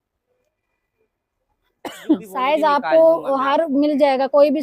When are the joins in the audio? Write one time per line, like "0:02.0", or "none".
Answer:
0:02.3